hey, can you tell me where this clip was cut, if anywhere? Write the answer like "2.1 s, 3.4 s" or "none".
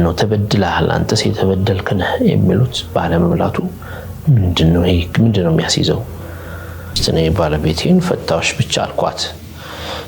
6.9 s